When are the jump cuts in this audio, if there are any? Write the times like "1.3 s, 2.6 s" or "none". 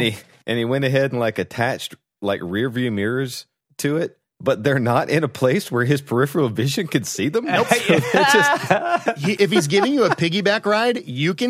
9.4 s